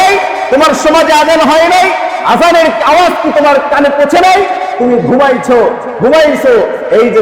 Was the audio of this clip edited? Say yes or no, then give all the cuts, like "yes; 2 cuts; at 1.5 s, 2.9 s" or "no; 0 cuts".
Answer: no; 0 cuts